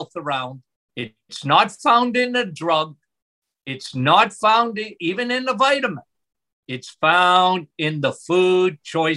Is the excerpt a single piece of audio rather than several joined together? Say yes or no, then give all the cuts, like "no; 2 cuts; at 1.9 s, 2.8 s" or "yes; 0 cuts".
yes; 0 cuts